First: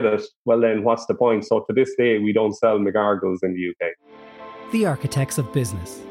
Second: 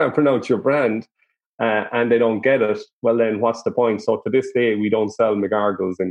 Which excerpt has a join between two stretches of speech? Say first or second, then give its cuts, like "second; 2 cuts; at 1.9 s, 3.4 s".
first; 1 cut; at 4.4 s